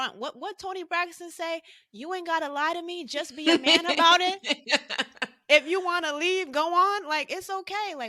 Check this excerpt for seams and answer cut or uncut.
uncut